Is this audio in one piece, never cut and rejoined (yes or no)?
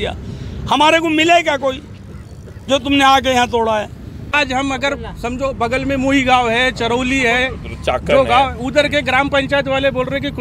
no